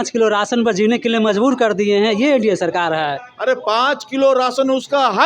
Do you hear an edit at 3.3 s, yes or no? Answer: yes